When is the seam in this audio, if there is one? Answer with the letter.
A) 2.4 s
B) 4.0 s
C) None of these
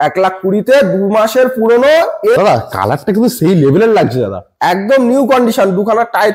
A